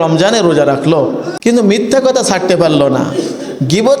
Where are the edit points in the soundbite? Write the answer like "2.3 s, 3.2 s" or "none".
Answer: 1.3 s